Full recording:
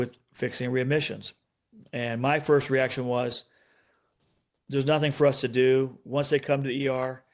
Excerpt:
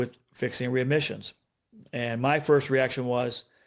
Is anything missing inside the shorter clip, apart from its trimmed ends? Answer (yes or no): no